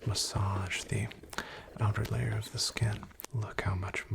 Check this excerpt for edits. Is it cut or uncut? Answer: cut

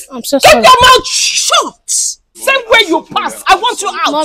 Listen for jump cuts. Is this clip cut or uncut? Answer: cut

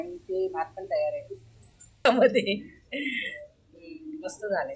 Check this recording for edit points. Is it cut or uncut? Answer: cut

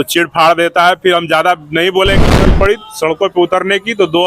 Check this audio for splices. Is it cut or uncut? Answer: cut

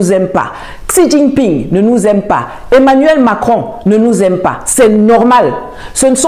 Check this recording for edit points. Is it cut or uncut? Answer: uncut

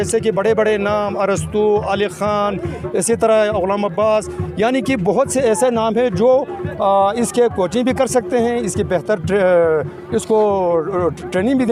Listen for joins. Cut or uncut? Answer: uncut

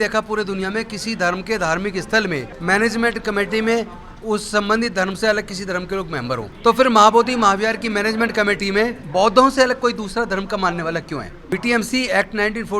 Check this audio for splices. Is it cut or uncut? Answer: cut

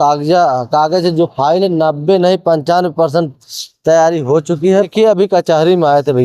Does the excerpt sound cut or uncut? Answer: cut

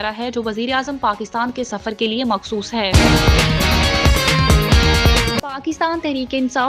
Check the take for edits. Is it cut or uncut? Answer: cut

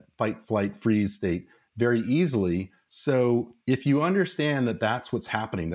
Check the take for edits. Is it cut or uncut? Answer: cut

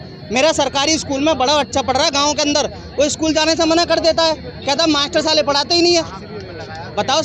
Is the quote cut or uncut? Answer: uncut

